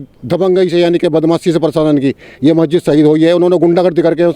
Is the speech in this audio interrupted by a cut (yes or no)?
no